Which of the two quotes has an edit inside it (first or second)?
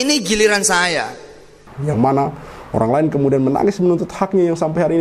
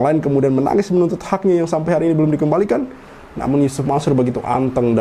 first